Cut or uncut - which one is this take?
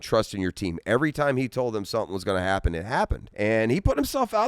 cut